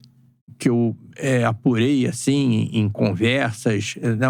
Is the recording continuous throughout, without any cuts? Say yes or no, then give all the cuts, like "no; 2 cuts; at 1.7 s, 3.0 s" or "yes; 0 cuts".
yes; 0 cuts